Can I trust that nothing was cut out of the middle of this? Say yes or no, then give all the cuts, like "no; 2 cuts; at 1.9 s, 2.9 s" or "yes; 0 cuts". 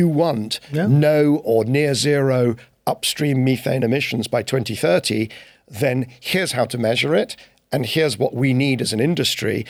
yes; 0 cuts